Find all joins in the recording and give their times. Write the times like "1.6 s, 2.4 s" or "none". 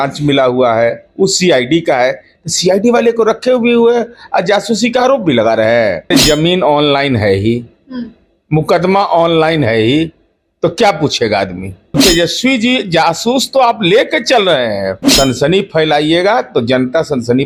6.1 s, 12.0 s, 15.0 s

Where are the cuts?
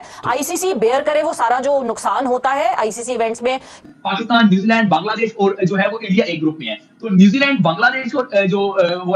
3.8 s

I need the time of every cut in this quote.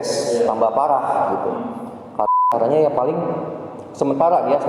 2.4 s

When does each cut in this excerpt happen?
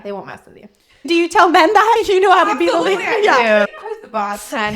3.8 s

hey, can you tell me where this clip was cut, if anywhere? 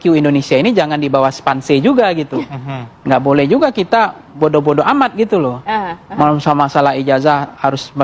none

